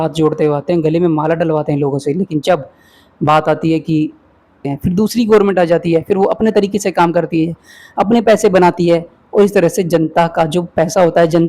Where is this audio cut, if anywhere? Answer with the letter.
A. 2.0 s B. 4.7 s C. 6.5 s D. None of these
B